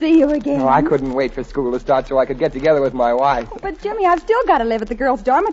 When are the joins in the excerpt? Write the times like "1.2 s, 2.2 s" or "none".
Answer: none